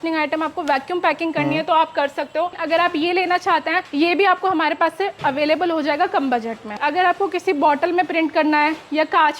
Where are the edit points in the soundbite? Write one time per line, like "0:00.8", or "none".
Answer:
0:02.6
0:03.8
0:06.8